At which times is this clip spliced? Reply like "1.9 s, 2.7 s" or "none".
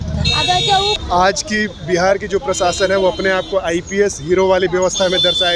1.0 s

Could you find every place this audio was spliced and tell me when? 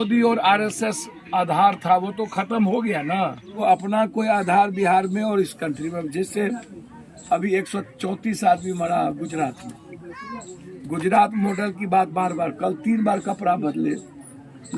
3.5 s

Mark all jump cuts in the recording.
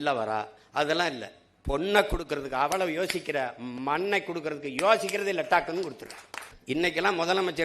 6.5 s

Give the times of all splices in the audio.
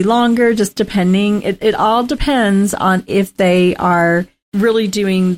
4.4 s

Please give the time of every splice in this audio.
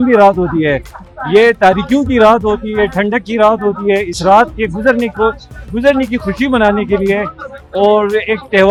none

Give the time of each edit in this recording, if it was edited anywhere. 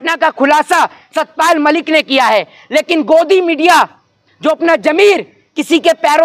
none

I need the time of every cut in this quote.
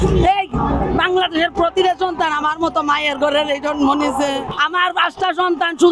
4.5 s

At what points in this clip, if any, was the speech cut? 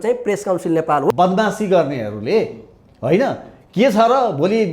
1.1 s

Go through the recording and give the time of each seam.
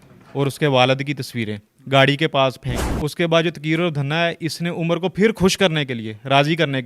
2.7 s

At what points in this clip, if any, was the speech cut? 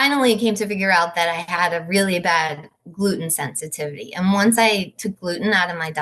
none

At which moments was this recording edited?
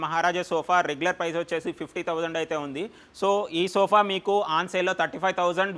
none

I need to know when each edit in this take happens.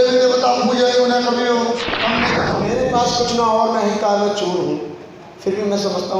2.5 s

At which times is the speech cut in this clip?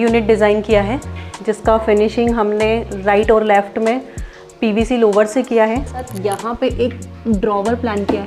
6.0 s

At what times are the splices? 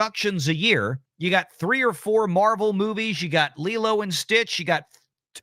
1.0 s

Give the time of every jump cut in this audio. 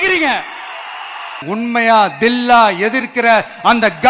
1.4 s

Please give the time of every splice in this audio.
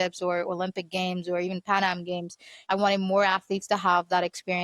2.5 s

